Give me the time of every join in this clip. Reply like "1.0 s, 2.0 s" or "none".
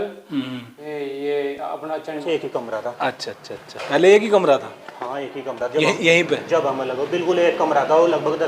2.2 s